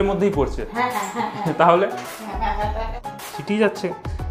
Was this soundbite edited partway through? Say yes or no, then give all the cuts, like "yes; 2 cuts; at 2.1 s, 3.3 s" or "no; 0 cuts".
yes; 1 cut; at 3.1 s